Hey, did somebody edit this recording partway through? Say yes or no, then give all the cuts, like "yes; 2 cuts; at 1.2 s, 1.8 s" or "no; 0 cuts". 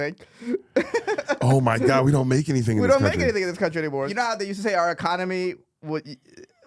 yes; 1 cut; at 4.1 s